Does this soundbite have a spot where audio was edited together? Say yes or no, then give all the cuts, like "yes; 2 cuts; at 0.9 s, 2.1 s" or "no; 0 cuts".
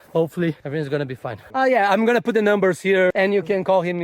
yes; 2 cuts; at 1.5 s, 3.1 s